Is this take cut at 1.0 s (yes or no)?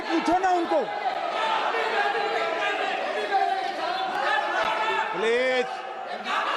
no